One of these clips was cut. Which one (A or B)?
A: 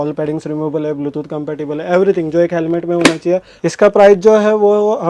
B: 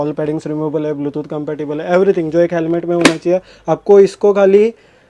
A